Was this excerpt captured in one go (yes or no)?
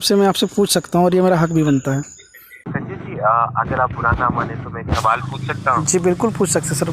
no